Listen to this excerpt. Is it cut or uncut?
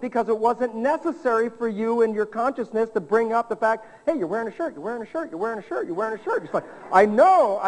uncut